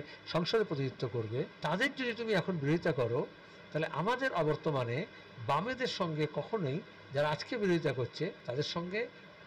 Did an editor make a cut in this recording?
yes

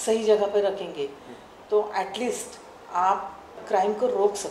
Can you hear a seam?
yes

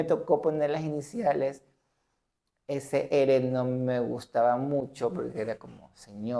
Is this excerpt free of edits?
yes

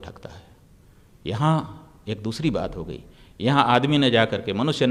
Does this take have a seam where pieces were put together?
no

